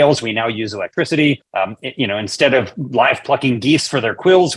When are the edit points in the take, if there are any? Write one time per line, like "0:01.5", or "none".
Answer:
0:01.5